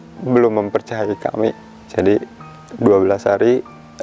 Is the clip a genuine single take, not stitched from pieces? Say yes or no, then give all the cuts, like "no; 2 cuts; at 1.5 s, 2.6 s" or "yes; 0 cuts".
no; 1 cut; at 1.7 s